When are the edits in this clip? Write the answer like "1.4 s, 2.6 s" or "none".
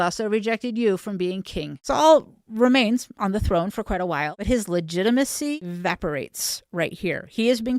1.7 s, 4.3 s, 5.6 s